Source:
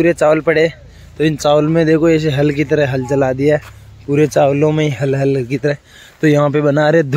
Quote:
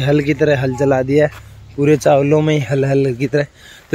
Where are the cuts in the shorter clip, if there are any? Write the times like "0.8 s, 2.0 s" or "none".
none